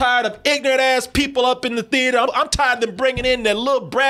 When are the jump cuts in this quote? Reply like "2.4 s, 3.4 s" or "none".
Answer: 2.3 s

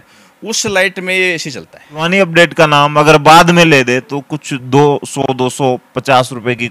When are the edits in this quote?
2.1 s

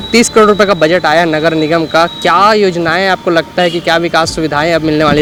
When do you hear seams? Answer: none

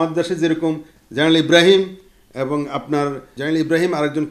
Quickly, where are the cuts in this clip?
3.3 s

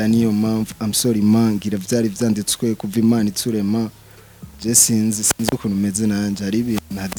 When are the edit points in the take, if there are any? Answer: none

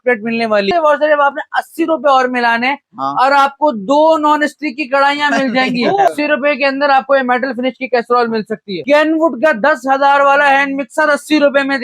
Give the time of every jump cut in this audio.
0.7 s, 6.1 s, 8.8 s

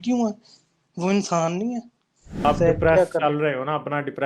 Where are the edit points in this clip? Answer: 2.4 s

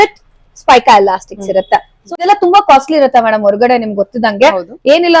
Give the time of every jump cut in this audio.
2.2 s

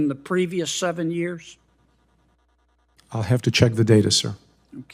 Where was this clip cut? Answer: none

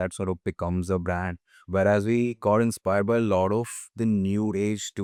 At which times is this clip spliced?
none

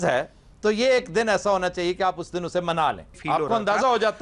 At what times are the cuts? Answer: 3.1 s

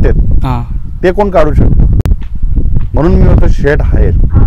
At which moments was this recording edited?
none

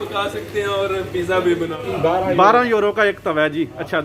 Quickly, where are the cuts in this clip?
1.6 s

